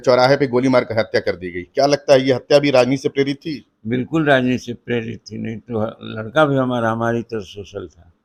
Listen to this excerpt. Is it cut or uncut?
uncut